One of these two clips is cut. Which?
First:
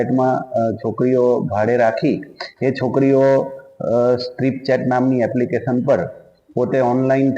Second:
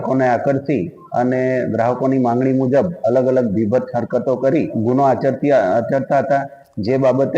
second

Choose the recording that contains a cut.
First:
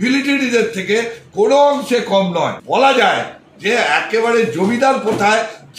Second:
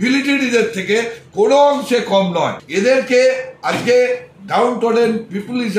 first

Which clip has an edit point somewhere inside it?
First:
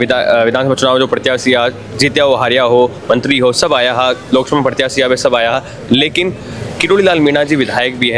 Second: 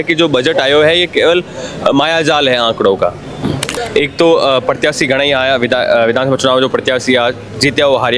second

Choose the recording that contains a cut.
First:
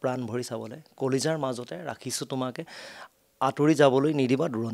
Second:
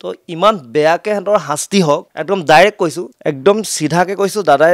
second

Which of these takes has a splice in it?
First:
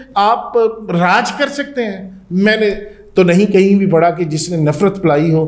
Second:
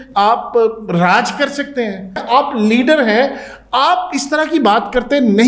second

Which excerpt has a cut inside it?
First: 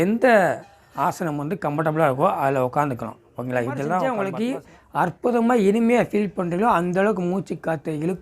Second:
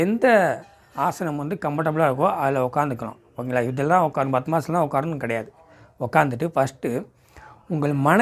first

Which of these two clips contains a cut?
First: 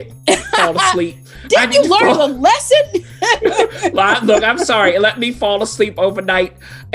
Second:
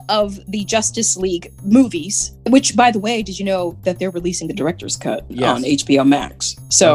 second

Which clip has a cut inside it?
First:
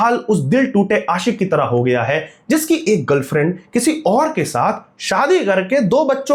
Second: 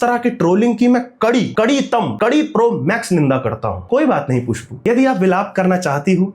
second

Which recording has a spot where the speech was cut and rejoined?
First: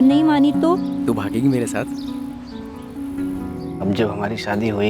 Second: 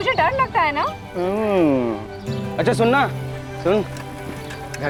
first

